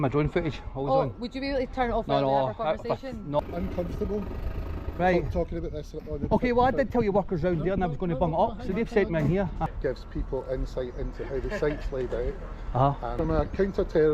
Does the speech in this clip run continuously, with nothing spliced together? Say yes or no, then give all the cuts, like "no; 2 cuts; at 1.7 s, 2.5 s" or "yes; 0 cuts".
no; 3 cuts; at 3.4 s, 9.7 s, 13.1 s